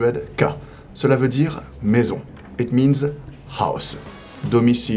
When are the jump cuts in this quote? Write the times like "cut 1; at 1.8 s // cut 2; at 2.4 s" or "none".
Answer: none